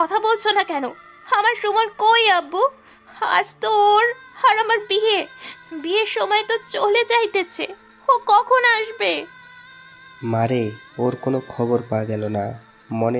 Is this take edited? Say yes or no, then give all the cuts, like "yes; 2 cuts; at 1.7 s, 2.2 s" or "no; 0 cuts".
no; 0 cuts